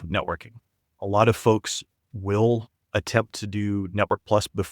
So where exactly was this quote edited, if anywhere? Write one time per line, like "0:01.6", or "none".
0:01.0